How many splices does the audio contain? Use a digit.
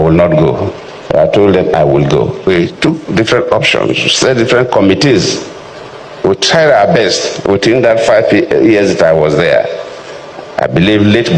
1